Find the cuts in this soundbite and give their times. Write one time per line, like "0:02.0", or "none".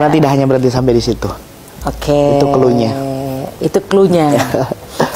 none

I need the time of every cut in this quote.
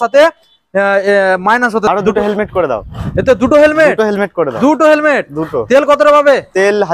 0:01.9

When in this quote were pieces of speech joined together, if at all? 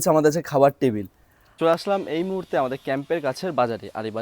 0:01.0

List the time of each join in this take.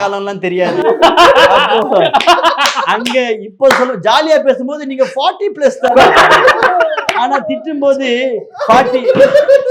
none

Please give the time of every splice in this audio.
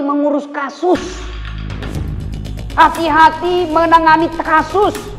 0:01.2
0:02.5

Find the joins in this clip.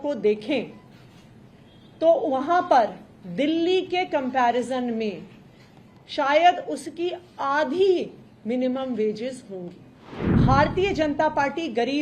0:10.4

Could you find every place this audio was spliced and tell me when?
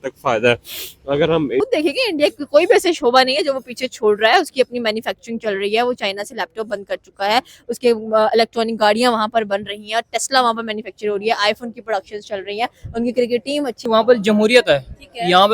0:01.6
0:13.8

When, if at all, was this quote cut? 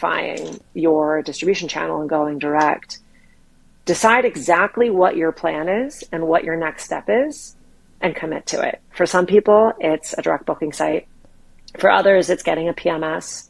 none

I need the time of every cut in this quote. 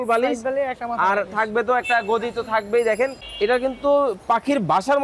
0:03.2

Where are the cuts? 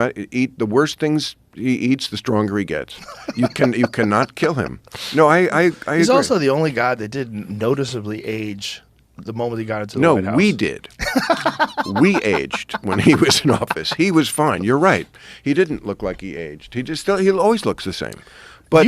0:12.1

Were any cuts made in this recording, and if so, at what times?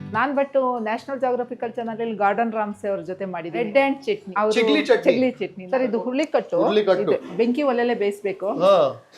0:04.3
0:05.5
0:07.2

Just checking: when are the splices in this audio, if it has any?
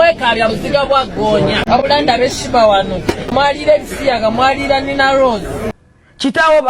0:01.6
0:03.3
0:05.7

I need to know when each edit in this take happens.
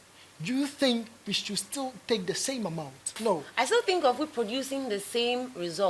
0:03.2

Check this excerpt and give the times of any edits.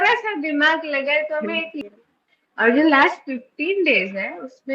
0:01.8

